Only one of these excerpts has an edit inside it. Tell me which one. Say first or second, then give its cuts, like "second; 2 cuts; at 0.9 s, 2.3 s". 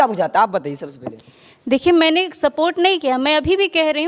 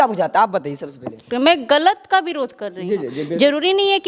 second; 1 cut; at 1.2 s